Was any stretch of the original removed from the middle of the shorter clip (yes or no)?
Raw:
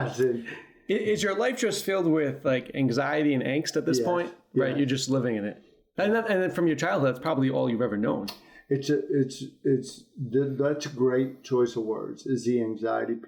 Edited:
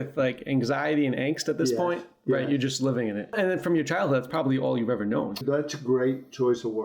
yes